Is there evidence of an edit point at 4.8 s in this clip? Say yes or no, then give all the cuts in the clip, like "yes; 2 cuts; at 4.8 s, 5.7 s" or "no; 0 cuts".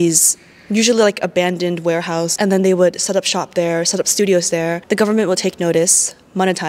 yes; 2 cuts; at 2.3 s, 4.8 s